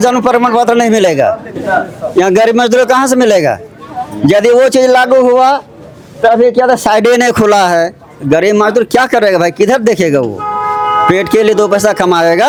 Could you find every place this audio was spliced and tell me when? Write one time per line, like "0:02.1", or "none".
none